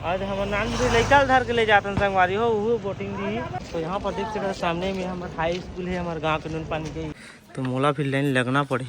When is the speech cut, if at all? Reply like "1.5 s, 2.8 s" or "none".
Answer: 3.7 s, 7.1 s